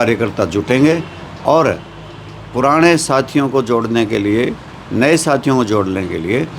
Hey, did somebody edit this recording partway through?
no; 0 cuts

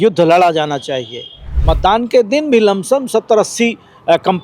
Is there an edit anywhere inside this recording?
yes; 1 cut; at 1.5 s

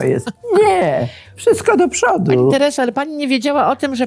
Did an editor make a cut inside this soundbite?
no; 0 cuts

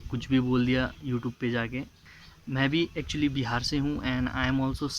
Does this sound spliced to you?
yes; 1 cut; at 2.0 s

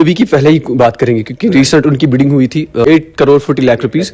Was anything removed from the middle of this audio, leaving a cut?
no; 0 cuts

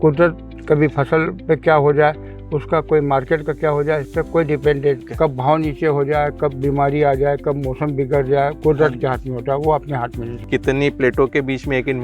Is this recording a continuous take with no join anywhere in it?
no; 2 cuts; at 5.1 s, 10.3 s

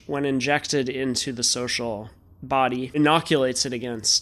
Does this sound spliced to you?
yes; 1 cut; at 3.0 s

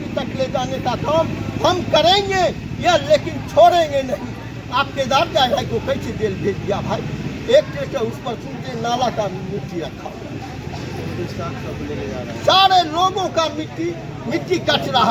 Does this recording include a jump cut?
no; 0 cuts

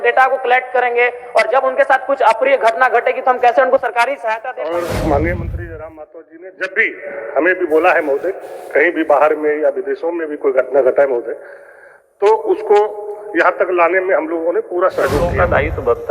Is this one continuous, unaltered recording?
no; 2 cuts; at 4.6 s, 15.2 s

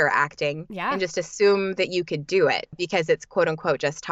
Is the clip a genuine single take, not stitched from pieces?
no; 1 cut; at 2.8 s

